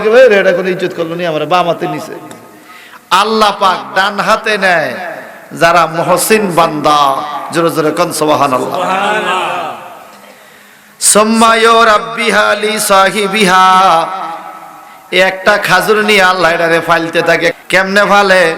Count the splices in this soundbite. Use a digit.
1